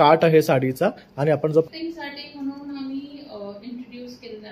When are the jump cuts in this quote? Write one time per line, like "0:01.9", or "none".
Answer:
0:01.6